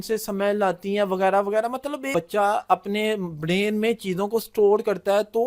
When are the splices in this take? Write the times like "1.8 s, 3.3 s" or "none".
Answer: 2.1 s